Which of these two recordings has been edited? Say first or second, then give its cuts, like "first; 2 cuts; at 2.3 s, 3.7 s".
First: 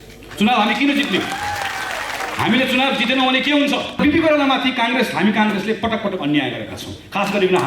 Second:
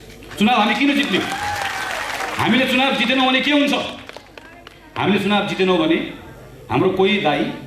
first; 1 cut; at 4.0 s